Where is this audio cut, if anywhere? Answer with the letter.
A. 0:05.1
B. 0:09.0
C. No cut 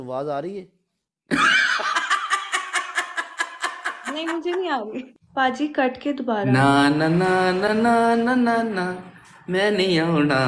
A